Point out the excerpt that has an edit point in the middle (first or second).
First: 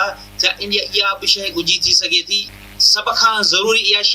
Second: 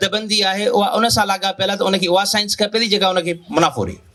first